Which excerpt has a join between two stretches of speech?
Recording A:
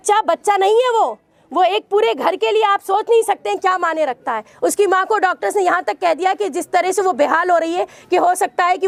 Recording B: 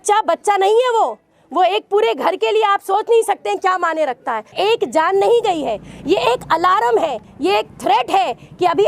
B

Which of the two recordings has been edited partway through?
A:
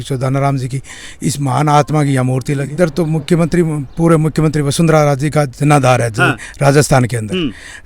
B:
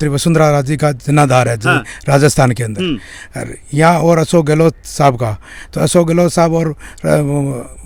A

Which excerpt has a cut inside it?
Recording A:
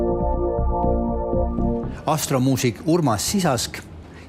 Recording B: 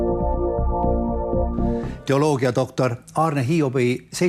A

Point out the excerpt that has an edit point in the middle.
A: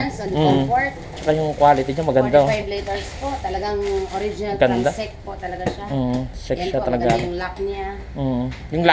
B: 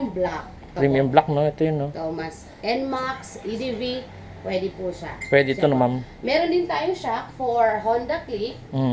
A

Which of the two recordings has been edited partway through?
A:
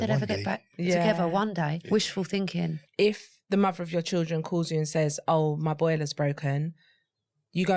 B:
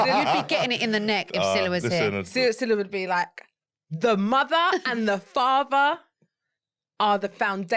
A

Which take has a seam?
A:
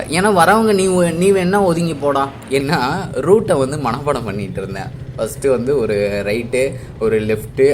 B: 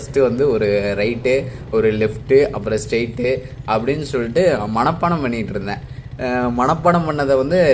A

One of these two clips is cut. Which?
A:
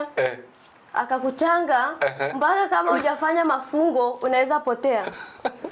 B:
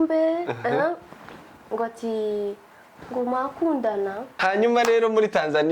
B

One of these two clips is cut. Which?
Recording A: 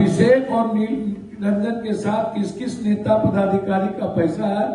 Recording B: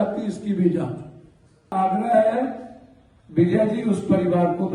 B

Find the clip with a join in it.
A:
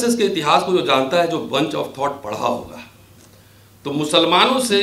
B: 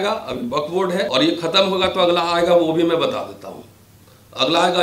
B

